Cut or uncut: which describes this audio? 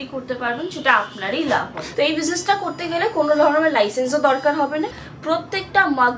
cut